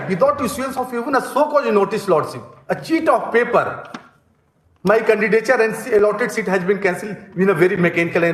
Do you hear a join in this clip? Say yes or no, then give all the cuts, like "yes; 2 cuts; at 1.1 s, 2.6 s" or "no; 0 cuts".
no; 0 cuts